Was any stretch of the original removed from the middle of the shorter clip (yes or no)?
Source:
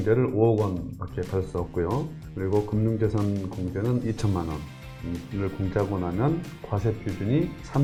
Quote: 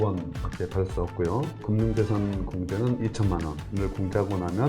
yes